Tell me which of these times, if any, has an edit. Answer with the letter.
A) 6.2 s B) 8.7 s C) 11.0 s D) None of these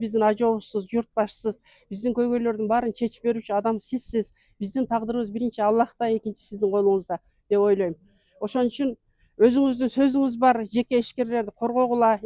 D